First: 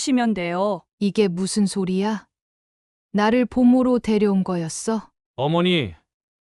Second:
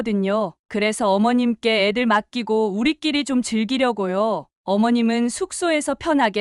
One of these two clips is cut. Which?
first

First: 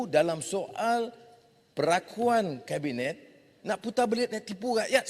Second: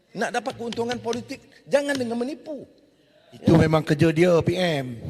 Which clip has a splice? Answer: first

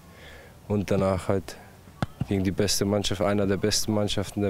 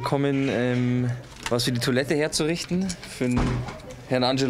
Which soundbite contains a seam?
second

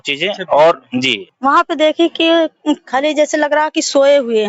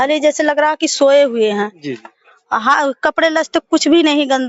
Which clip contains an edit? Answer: first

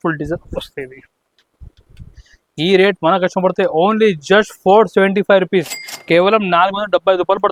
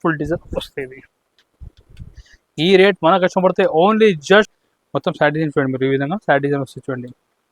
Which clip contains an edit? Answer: second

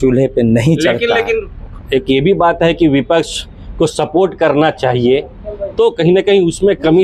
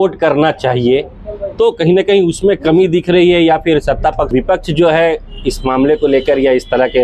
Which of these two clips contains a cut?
second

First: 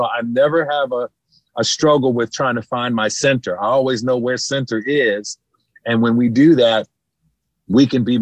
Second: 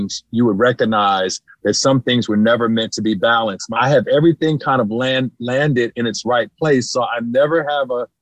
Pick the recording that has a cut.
second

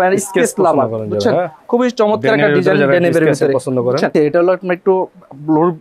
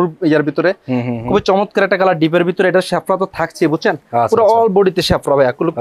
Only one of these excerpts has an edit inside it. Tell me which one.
first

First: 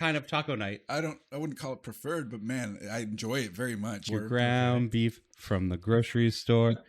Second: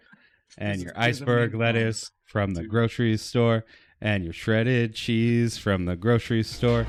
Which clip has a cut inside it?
first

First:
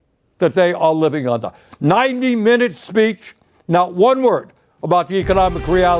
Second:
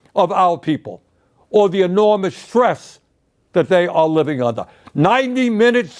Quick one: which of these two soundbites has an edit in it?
second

